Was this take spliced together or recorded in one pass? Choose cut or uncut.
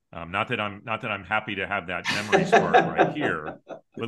uncut